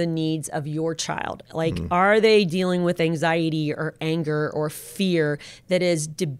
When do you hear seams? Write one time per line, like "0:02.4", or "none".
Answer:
none